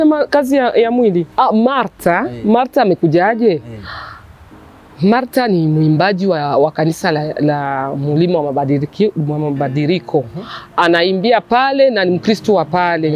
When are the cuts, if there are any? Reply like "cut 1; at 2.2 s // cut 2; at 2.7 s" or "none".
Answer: cut 1; at 1.3 s